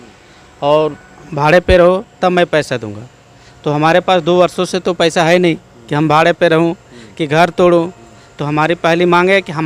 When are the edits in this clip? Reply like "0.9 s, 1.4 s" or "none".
none